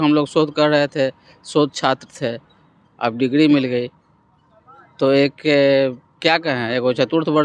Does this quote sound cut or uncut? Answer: uncut